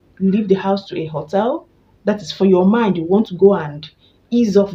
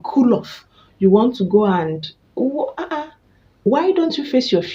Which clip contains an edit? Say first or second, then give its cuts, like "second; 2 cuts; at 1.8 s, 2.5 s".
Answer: second; 1 cut; at 3.7 s